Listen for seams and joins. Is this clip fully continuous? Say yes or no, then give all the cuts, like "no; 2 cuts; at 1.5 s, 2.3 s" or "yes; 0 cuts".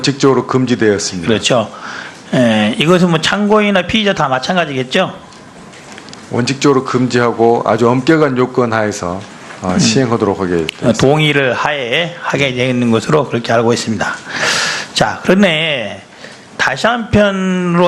no; 1 cut; at 10.3 s